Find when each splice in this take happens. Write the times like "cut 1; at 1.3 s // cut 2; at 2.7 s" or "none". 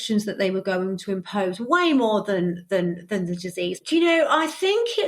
cut 1; at 3.8 s